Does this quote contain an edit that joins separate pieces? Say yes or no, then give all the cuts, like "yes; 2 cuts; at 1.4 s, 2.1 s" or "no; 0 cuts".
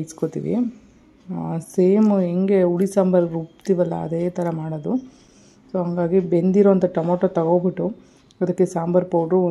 no; 0 cuts